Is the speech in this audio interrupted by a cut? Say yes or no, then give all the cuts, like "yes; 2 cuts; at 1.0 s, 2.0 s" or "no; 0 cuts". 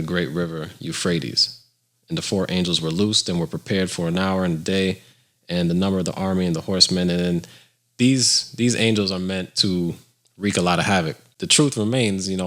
yes; 1 cut; at 11.4 s